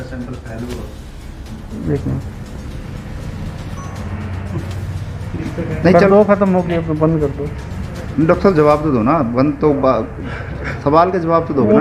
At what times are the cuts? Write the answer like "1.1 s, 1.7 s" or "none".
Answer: none